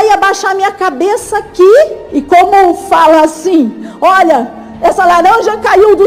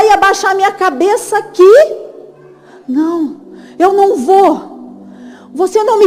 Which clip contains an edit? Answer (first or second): first